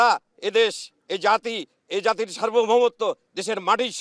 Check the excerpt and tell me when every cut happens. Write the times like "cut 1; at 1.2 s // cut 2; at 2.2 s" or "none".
none